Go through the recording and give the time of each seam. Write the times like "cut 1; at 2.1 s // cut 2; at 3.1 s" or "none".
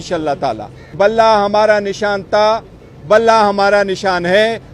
cut 1; at 0.9 s